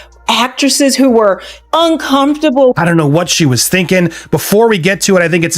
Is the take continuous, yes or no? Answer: no